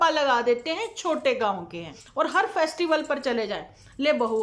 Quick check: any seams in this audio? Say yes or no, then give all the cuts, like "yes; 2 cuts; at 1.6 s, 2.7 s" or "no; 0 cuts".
yes; 1 cut; at 2.0 s